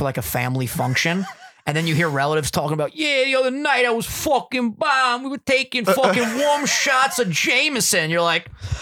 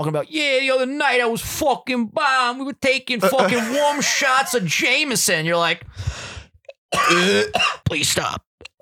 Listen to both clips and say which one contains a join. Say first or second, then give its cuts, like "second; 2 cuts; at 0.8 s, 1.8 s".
second; 1 cut; at 7.8 s